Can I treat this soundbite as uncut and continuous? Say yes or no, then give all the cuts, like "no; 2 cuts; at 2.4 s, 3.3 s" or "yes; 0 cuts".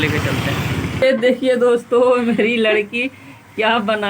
no; 1 cut; at 1.0 s